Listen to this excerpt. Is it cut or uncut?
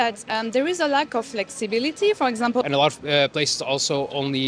cut